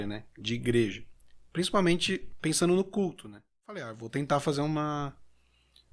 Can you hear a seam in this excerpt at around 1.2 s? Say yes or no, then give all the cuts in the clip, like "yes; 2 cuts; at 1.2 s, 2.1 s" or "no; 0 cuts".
no; 1 cut; at 4.0 s